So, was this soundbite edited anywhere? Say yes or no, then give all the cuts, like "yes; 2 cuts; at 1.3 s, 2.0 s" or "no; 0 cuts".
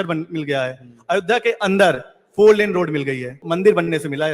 yes; 1 cut; at 3.4 s